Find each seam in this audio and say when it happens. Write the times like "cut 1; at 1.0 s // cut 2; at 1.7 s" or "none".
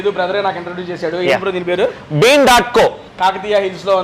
cut 1; at 3.1 s

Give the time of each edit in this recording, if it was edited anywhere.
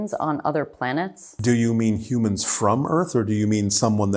cut 1; at 1.3 s

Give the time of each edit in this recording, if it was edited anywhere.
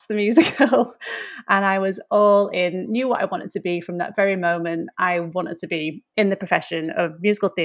none

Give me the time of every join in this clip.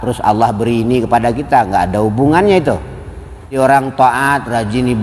cut 1; at 3.6 s

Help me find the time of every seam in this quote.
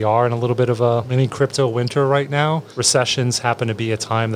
cut 1; at 1.1 s // cut 2; at 2.7 s

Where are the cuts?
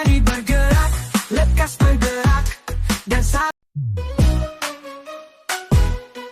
cut 1; at 3.5 s

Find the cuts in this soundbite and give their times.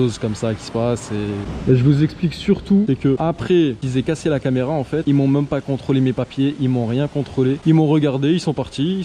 none

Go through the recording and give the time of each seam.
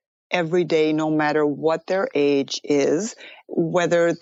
none

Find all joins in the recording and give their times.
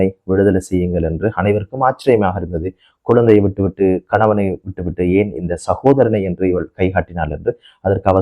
none

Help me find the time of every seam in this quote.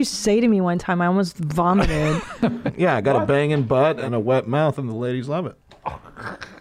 cut 1; at 2.7 s // cut 2; at 4.0 s

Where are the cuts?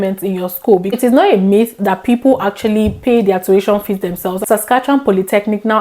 cut 1; at 1.0 s // cut 2; at 4.4 s

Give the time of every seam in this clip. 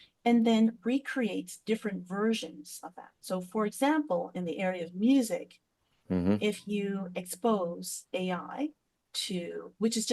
none

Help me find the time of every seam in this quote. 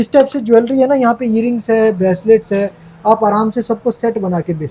none

